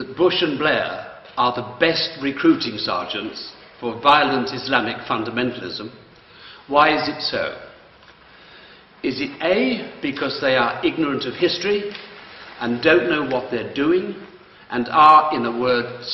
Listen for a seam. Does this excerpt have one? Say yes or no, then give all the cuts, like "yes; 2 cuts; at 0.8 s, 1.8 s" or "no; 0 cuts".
yes; 1 cut; at 14.8 s